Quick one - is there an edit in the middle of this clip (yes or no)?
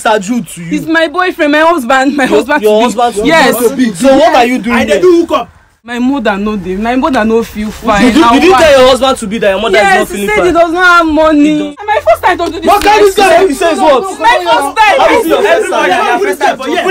yes